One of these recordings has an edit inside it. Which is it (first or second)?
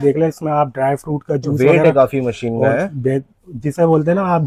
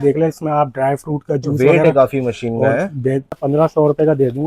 second